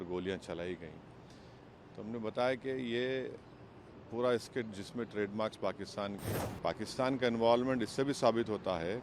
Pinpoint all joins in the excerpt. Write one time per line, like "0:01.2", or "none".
0:06.3